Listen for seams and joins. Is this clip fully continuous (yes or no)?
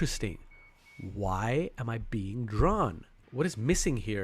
no